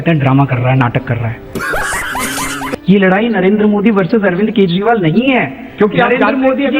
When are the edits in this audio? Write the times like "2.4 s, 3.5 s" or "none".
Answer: 2.7 s, 5.7 s

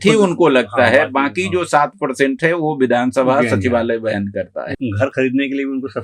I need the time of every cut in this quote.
4.7 s

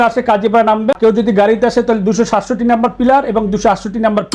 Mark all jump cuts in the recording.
1.0 s

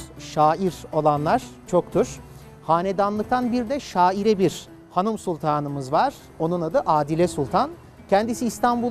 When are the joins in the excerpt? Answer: 7.8 s

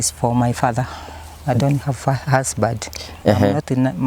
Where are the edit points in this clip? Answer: 3.1 s

